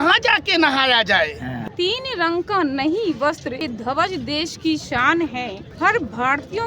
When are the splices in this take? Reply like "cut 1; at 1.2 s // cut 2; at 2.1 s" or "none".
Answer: cut 1; at 1.6 s // cut 2; at 3.6 s // cut 3; at 5.6 s